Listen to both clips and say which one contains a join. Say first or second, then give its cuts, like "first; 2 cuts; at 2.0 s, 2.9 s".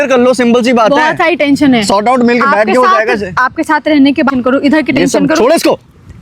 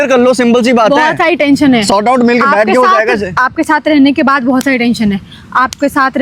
first; 1 cut; at 4.3 s